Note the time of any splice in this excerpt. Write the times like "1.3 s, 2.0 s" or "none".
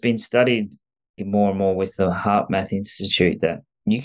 1.2 s